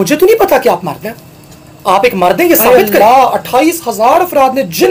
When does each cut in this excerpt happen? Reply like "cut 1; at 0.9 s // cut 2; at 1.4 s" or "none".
cut 1; at 2.6 s